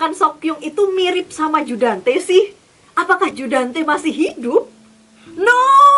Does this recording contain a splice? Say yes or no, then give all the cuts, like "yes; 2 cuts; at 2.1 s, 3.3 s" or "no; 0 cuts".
no; 0 cuts